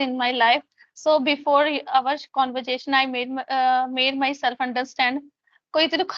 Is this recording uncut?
yes; 0 cuts

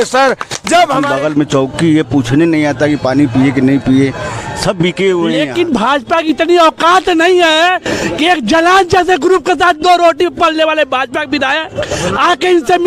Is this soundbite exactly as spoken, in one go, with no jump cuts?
no; 2 cuts; at 1.1 s, 5.4 s

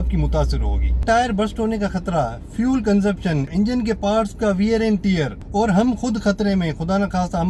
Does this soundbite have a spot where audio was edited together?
yes; 3 cuts; at 1.0 s, 3.5 s, 5.4 s

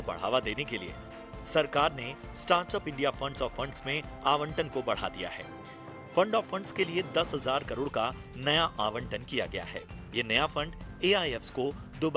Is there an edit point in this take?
yes; 1 cut; at 11.2 s

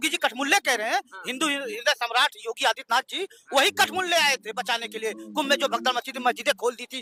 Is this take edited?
no; 0 cuts

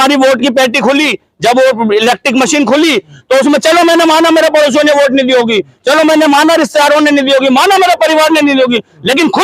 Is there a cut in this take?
no; 0 cuts

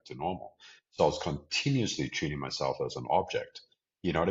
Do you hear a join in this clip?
no; 0 cuts

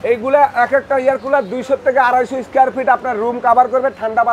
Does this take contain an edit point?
no; 0 cuts

